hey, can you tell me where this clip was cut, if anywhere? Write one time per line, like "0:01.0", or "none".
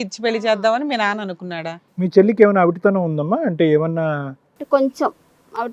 0:01.8